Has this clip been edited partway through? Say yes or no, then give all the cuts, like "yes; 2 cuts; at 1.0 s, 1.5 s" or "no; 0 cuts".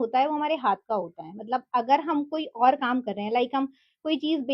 no; 0 cuts